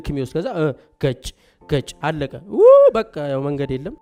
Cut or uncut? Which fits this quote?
uncut